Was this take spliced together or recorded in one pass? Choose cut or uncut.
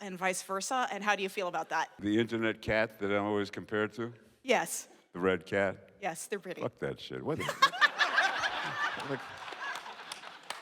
cut